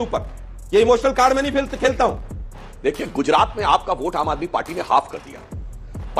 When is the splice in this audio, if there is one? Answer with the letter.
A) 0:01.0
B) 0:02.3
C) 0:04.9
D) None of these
B